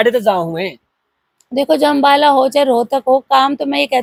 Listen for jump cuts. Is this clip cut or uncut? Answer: uncut